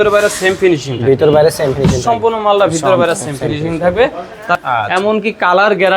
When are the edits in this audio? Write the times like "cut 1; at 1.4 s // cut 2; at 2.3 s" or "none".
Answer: cut 1; at 4.6 s

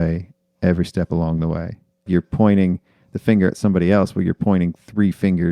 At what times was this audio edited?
cut 1; at 2.1 s

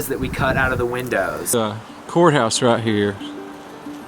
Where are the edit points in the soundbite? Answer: cut 1; at 1.5 s

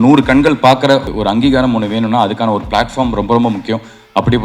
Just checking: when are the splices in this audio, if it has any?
cut 1; at 1.1 s

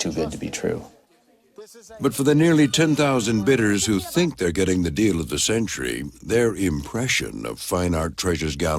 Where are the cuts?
cut 1; at 7.8 s

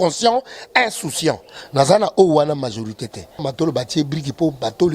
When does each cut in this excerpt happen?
cut 1; at 3.4 s

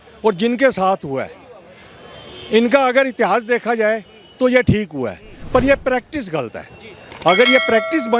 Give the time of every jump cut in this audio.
none

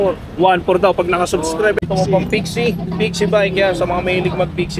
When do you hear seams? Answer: cut 1; at 1.8 s

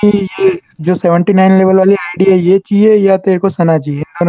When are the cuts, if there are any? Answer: none

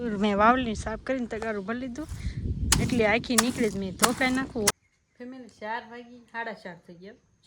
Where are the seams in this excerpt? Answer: cut 1; at 4.7 s

